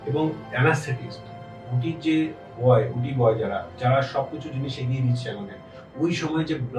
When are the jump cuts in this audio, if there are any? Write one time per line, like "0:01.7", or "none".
none